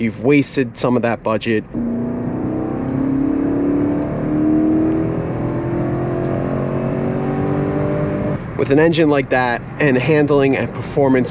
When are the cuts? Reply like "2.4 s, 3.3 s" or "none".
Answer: 1.7 s, 8.4 s